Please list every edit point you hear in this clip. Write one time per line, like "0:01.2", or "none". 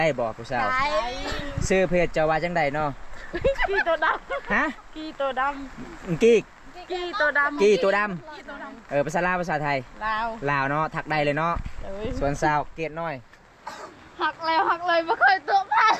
none